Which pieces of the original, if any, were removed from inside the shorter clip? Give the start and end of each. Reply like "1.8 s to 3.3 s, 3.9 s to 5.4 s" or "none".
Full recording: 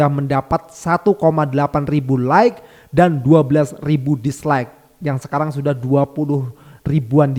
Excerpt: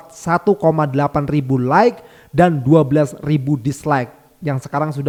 none